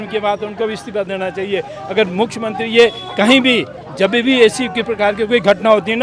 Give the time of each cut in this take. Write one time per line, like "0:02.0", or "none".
none